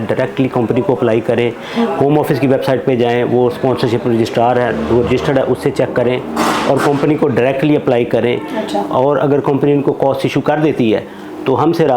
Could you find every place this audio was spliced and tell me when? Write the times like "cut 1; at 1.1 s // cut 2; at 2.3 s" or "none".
none